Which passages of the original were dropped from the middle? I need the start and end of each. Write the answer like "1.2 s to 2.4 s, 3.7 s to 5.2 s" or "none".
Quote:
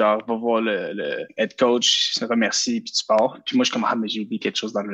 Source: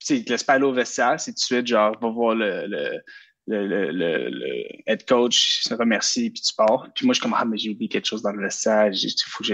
3.0 s to 4.7 s